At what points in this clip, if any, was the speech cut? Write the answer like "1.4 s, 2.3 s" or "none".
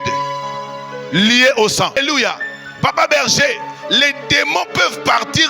2.0 s